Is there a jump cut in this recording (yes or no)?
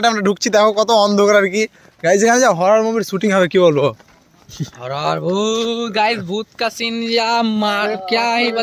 no